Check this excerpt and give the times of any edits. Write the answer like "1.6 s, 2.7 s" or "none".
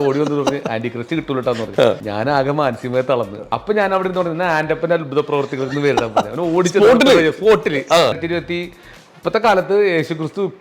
2.1 s, 3.4 s, 8.2 s